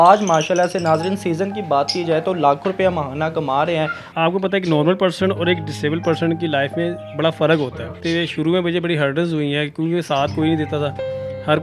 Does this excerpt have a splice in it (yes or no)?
yes